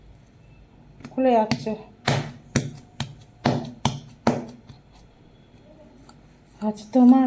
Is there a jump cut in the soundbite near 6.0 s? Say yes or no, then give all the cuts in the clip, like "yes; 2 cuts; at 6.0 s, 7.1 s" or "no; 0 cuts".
no; 0 cuts